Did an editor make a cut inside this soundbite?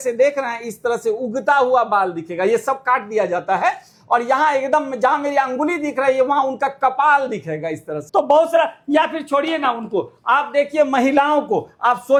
no; 0 cuts

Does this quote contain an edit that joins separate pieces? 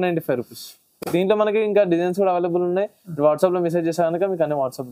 no; 0 cuts

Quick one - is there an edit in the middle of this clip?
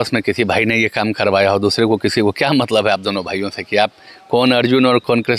no; 0 cuts

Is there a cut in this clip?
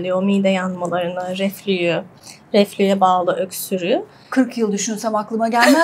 no; 0 cuts

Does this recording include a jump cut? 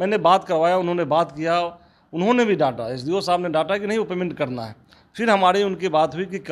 no; 0 cuts

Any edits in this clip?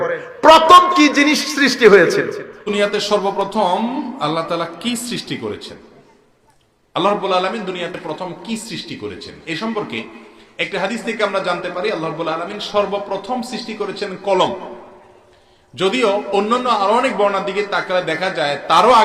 yes; 1 cut; at 2.5 s

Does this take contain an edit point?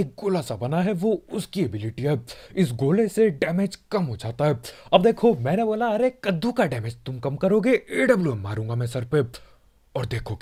no; 0 cuts

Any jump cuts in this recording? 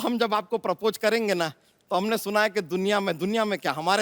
no; 0 cuts

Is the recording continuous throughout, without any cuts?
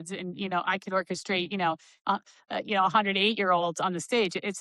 yes; 0 cuts

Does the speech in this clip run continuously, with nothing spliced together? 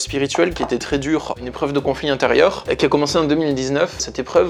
yes; 0 cuts

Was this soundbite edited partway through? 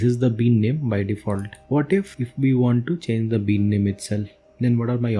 no; 0 cuts

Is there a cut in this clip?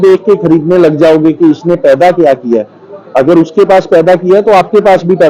no; 0 cuts

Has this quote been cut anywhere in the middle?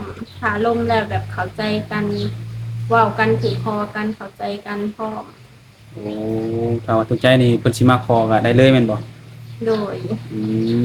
no; 0 cuts

